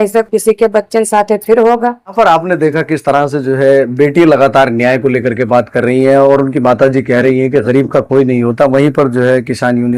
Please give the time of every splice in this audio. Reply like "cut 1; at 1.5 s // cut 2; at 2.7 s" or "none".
none